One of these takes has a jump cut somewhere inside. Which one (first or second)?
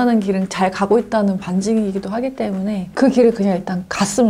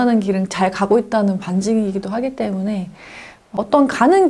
first